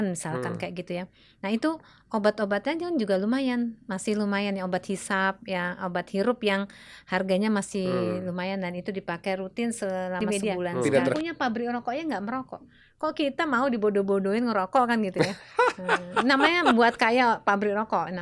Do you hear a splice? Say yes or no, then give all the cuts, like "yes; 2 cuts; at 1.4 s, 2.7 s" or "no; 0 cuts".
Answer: yes; 1 cut; at 11.2 s